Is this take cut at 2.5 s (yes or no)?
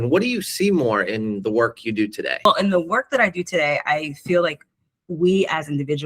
yes